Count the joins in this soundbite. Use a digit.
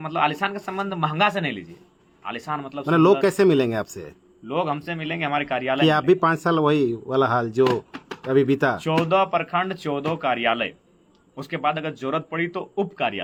0